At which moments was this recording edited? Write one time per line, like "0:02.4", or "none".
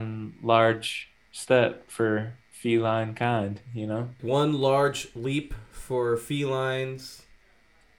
0:04.2